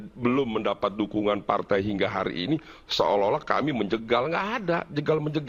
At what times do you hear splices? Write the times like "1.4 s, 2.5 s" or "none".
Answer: none